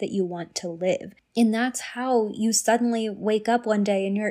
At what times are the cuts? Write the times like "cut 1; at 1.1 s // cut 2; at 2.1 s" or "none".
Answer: cut 1; at 1.2 s